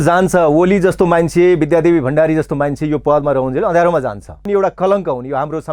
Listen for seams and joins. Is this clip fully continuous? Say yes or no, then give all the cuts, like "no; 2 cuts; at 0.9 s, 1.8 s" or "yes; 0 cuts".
no; 1 cut; at 4.4 s